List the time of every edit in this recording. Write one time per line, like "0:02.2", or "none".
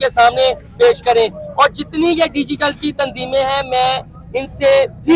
none